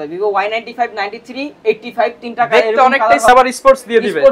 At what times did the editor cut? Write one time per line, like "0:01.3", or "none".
0:03.3